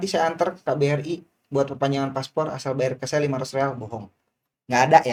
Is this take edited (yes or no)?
no